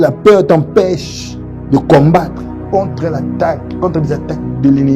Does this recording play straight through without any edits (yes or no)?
yes